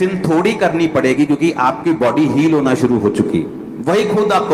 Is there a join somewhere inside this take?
no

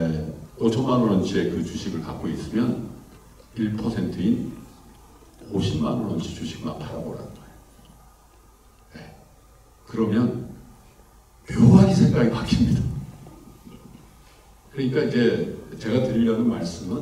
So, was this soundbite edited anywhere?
yes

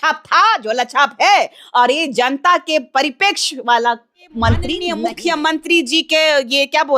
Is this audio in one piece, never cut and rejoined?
no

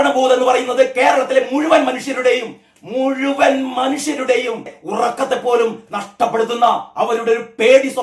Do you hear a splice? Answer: yes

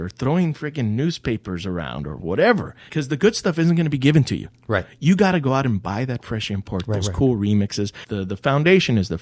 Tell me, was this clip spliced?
yes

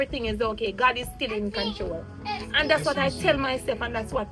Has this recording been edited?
no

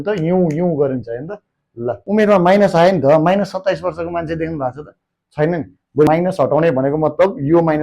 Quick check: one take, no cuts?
no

